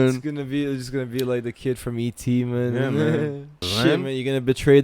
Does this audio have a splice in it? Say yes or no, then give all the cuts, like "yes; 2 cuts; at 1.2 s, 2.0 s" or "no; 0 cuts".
yes; 1 cut; at 3.6 s